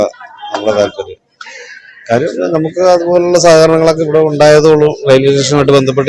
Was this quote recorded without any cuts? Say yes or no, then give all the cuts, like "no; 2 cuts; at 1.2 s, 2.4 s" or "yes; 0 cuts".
yes; 0 cuts